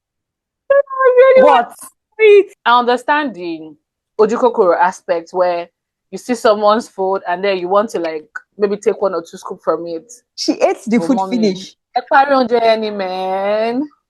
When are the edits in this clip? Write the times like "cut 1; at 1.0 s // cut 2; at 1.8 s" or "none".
cut 1; at 2.5 s